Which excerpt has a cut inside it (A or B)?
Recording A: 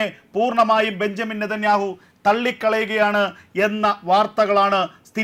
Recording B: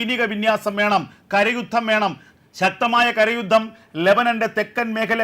B